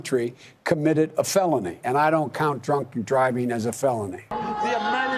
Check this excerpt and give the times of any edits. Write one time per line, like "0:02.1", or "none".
0:01.8
0:04.3